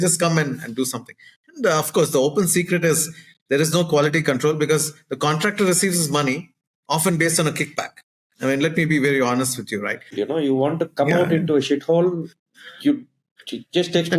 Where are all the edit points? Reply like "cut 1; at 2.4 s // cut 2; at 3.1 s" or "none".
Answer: cut 1; at 10.2 s